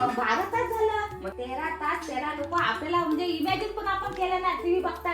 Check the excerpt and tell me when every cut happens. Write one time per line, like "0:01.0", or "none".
0:01.3